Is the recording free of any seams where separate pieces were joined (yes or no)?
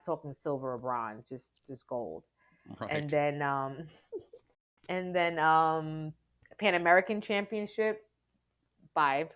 yes